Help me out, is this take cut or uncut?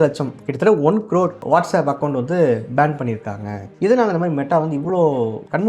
cut